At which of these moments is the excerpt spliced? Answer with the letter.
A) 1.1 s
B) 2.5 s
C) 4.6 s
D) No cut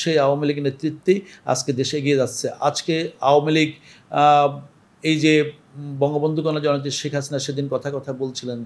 D